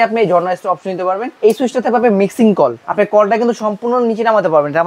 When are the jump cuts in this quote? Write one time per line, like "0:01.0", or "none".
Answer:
0:01.3
0:02.8